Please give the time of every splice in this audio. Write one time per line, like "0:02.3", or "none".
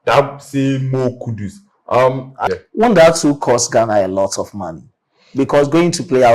0:02.4